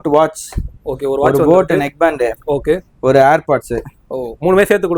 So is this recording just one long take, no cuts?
yes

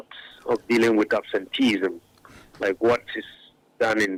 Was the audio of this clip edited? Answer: no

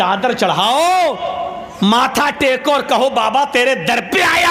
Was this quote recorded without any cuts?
yes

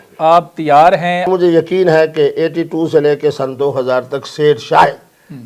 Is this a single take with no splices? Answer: no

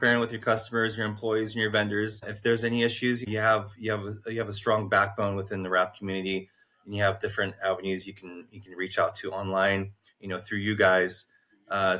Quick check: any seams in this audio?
yes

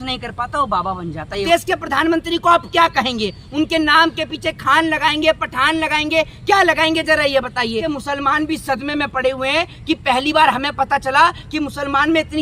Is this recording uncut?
no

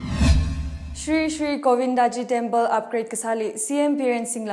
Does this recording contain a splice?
yes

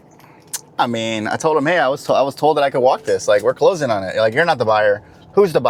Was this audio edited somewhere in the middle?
no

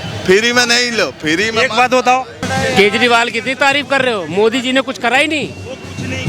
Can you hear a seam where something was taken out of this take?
yes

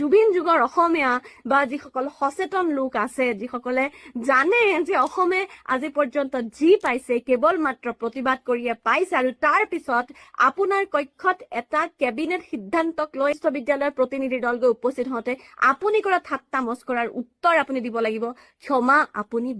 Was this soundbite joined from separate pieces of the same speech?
no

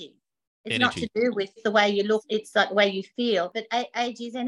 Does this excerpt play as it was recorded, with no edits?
no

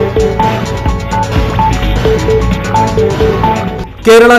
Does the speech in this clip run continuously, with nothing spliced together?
no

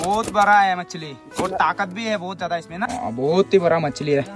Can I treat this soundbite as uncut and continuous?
no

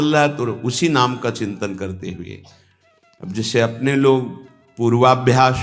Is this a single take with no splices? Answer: yes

